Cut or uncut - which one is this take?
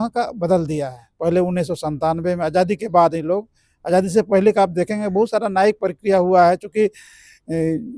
cut